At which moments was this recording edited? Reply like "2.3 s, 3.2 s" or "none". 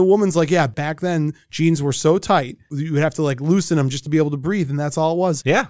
2.8 s